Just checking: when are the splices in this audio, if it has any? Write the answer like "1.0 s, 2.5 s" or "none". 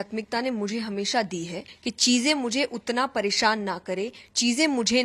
1.7 s